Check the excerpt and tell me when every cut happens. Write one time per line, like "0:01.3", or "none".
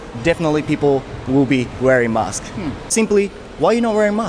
0:02.9